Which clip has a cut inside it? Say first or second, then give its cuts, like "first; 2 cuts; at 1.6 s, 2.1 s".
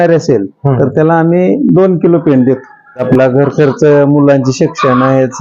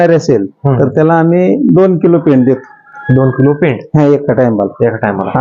first; 1 cut; at 3.0 s